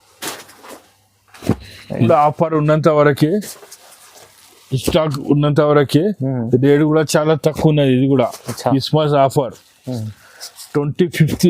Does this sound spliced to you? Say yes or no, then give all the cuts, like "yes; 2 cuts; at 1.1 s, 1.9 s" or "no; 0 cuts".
yes; 1 cut; at 2.0 s